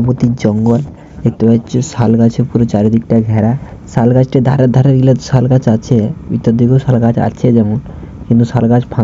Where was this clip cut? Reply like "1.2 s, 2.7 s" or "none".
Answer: none

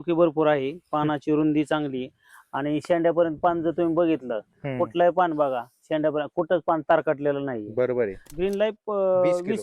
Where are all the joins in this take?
8.2 s

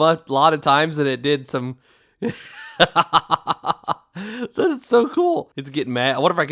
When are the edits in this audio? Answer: 5.6 s

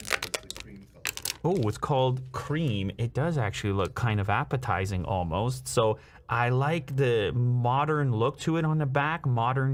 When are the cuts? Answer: none

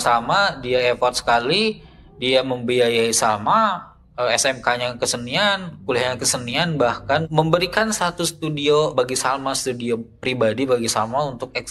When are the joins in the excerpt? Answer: 7.3 s, 8.9 s

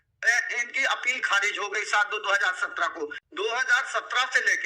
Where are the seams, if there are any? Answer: 3.2 s

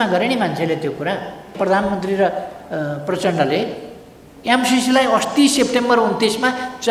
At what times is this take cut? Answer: 1.5 s

